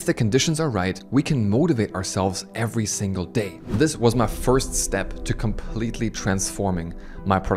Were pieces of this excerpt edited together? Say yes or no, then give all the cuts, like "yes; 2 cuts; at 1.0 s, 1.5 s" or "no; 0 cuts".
yes; 2 cuts; at 1.0 s, 3.6 s